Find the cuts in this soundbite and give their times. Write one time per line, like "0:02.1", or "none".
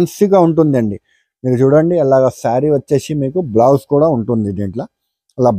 none